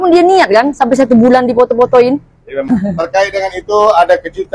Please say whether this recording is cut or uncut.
cut